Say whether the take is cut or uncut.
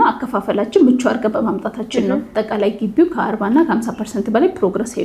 cut